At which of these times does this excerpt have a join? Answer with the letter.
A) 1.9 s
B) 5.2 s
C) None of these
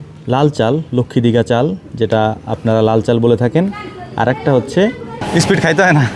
B